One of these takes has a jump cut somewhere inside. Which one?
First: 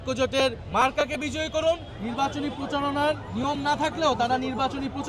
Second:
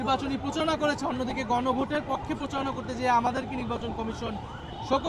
first; 1 cut; at 1.9 s

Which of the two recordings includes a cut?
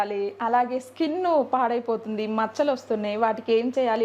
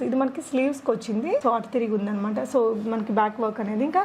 second; 1 cut; at 1.4 s

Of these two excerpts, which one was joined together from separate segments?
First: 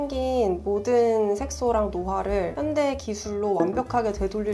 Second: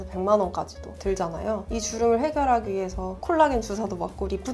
second; 1 cut; at 1.6 s

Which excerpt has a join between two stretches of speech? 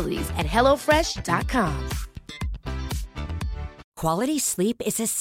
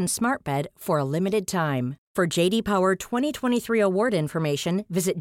first; 1 cut; at 3.9 s

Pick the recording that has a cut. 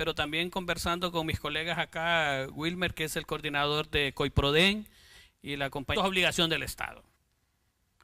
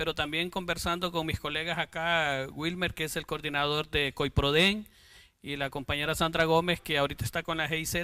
second; 1 cut; at 5.9 s

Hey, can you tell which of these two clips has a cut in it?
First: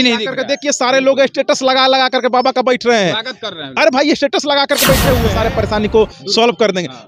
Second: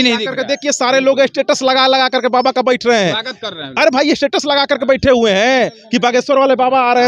first; 1 cut; at 5.3 s

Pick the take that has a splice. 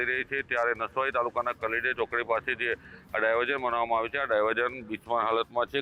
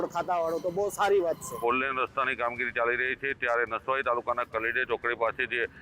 second; 1 cut; at 1.6 s

